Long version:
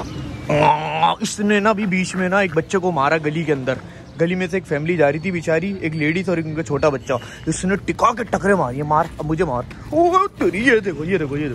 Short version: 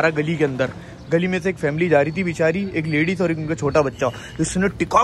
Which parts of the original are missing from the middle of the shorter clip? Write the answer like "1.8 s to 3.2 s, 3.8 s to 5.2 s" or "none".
none

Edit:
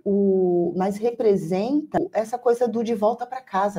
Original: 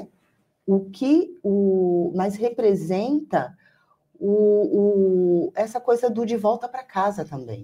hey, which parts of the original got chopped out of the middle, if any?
3.4 s to 5.4 s

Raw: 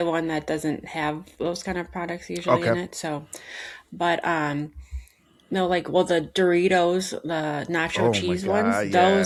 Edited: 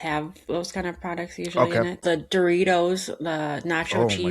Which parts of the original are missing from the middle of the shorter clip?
2.9 s to 6.1 s

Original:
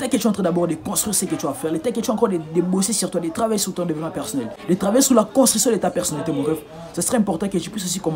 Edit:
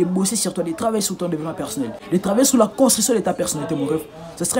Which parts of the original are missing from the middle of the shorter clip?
none

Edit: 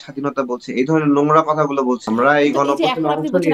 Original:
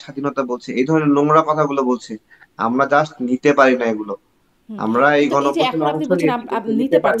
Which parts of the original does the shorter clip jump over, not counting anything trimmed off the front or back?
2.0 s to 4.8 s

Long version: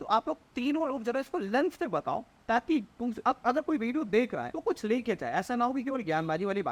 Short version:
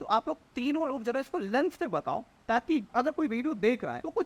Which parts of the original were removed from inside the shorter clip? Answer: 2.9 s to 3.4 s

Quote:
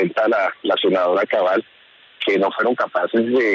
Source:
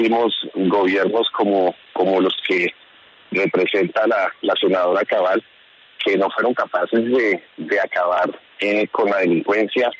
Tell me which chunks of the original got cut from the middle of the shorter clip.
none

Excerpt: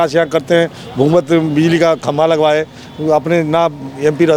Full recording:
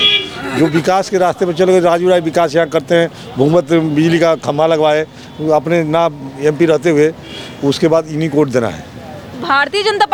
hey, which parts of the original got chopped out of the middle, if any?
none

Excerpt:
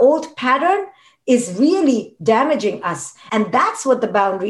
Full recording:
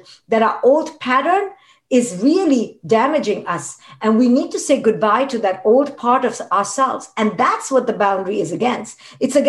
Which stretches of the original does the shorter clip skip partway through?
3.8 s to 7.0 s

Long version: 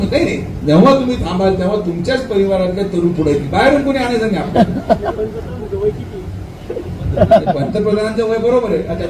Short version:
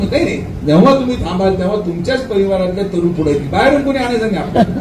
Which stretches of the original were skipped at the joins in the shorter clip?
none

